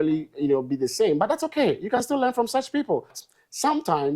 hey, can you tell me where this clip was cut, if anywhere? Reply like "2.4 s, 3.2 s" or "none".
3.2 s